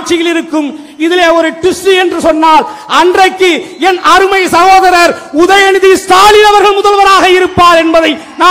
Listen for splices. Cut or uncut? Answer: uncut